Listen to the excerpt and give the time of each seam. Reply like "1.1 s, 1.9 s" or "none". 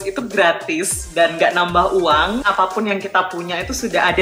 2.5 s